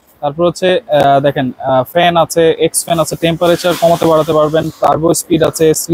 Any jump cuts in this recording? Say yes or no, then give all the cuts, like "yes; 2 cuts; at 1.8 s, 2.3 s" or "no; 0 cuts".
no; 0 cuts